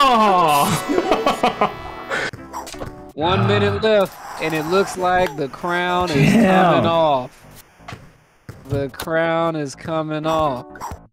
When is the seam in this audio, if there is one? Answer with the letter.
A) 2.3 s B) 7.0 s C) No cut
A